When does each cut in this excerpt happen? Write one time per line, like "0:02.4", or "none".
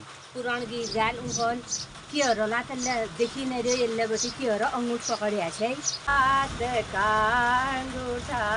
0:06.1

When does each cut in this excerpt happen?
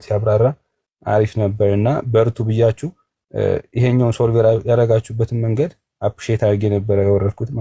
none

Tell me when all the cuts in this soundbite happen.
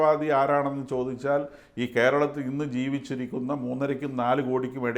none

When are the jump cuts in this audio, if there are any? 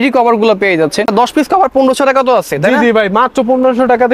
0:01.1

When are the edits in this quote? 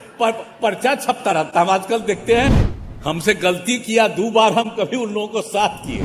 0:02.7

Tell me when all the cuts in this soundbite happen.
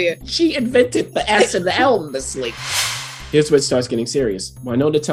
0:02.9

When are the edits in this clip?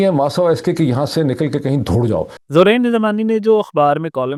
none

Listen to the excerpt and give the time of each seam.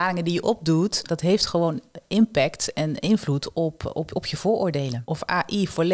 0:01.1
0:05.0

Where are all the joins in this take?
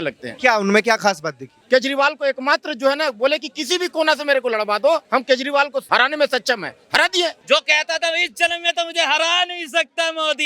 0:01.5
0:05.3
0:07.4

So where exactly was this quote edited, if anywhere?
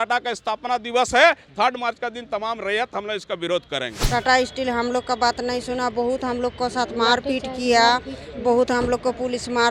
0:03.9

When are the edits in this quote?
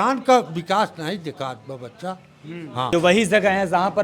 0:02.9

